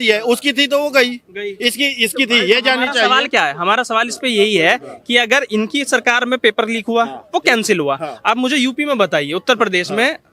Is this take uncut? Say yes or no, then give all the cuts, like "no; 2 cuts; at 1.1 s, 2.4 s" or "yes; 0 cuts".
yes; 0 cuts